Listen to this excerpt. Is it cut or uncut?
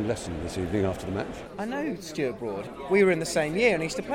cut